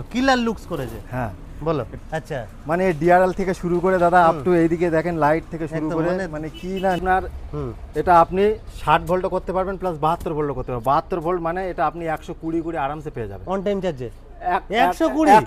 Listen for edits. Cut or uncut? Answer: cut